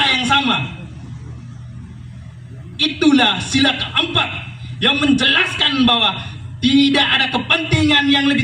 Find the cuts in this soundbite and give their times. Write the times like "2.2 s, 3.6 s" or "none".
none